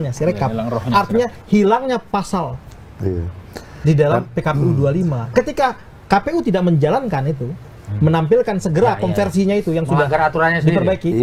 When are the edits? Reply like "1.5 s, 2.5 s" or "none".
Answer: none